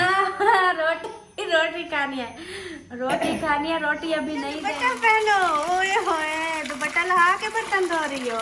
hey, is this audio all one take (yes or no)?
no